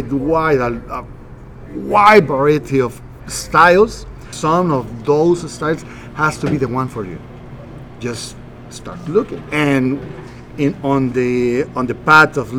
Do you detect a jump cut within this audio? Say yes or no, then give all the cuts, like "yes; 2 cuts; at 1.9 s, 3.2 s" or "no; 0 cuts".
yes; 1 cut; at 4.3 s